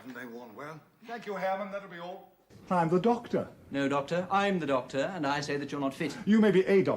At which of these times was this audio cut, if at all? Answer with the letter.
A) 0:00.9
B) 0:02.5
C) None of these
B